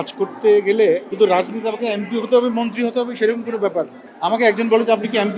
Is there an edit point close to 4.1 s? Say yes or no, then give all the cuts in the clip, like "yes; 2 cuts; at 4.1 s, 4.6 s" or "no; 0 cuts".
no; 1 cut; at 1.1 s